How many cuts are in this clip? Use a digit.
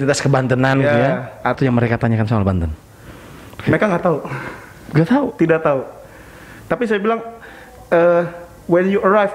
1